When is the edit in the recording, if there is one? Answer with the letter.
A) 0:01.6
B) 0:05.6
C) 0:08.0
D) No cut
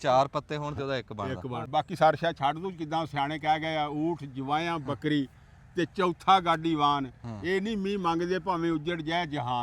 A